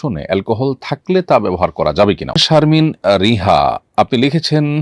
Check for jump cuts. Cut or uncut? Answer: cut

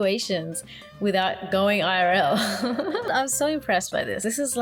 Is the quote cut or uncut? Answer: cut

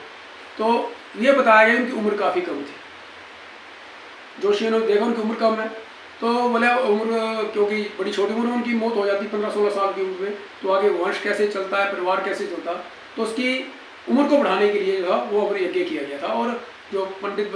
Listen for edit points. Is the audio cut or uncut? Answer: uncut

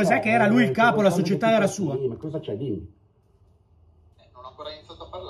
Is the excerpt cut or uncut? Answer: uncut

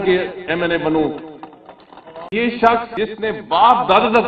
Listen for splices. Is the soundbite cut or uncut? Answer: cut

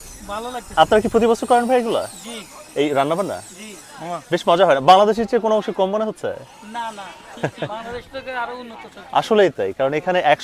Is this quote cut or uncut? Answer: uncut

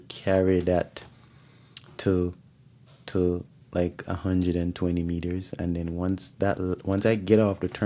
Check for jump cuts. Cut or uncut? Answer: uncut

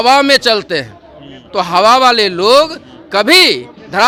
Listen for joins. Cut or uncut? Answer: uncut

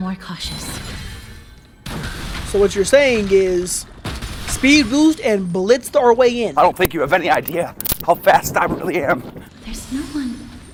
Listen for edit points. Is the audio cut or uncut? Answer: uncut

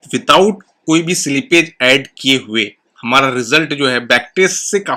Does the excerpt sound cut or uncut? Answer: uncut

